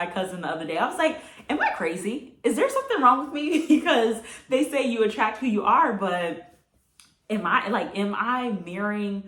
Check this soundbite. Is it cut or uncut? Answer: uncut